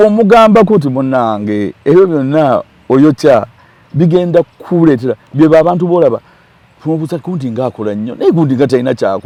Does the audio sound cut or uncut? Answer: uncut